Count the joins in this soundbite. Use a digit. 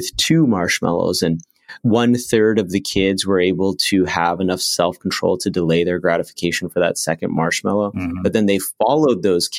1